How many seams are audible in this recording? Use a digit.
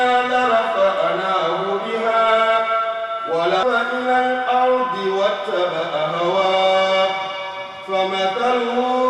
1